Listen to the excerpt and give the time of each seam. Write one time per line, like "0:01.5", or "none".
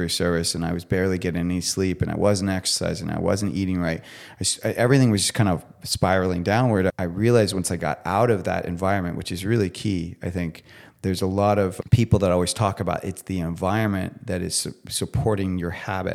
0:06.9
0:11.7